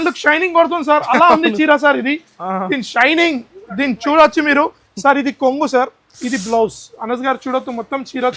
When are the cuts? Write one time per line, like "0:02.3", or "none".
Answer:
none